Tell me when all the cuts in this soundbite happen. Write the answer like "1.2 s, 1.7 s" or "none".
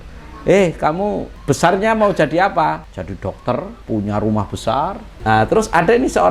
1.3 s, 2.9 s, 3.8 s, 5.1 s